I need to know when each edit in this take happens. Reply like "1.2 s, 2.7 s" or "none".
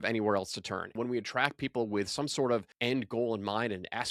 0.9 s, 2.7 s